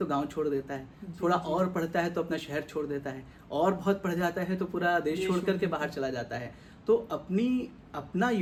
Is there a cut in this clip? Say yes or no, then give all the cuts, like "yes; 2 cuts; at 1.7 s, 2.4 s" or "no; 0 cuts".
no; 0 cuts